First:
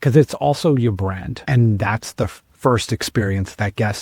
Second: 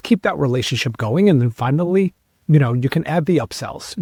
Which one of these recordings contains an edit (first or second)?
first